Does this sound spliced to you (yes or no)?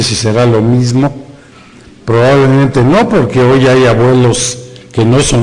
no